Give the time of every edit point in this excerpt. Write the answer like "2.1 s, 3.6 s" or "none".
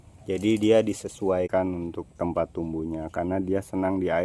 1.5 s